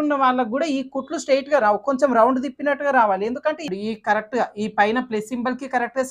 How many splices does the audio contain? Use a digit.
1